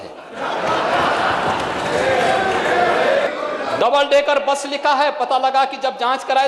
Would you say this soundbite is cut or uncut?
cut